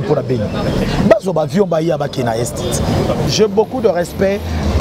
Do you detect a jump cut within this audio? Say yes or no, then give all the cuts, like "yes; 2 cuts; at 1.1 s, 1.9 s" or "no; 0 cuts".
yes; 1 cut; at 3.3 s